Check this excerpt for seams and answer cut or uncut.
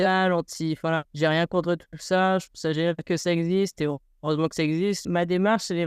cut